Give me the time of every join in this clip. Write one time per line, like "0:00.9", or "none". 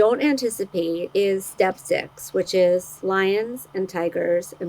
0:01.1
0:02.9